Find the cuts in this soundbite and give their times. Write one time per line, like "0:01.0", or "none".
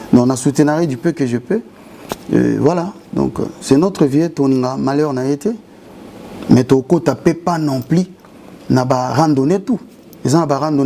none